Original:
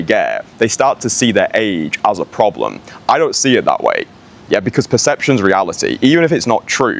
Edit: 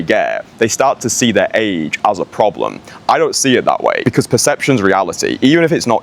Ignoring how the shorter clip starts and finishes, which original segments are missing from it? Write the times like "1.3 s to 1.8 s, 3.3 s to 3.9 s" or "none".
4.0 s to 4.6 s